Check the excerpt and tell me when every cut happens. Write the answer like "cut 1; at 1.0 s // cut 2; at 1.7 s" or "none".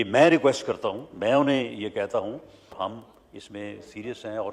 cut 1; at 2.7 s